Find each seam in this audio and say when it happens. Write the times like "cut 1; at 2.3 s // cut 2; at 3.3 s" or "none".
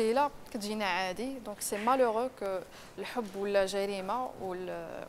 none